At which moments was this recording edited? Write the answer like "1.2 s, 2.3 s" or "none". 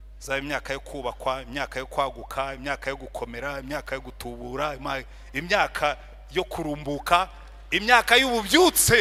none